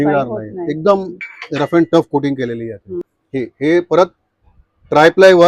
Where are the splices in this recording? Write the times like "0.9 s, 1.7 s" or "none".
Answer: 3.0 s